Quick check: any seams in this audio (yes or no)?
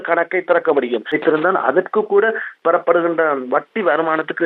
yes